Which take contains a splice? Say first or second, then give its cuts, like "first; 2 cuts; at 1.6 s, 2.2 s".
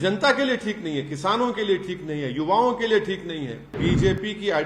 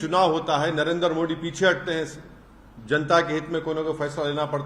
first; 1 cut; at 3.8 s